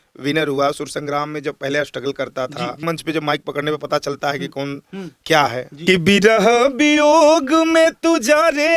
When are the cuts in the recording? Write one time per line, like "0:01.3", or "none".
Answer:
0:02.8
0:05.7